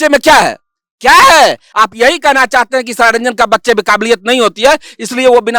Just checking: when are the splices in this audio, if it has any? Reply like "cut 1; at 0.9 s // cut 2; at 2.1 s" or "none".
cut 1; at 1.6 s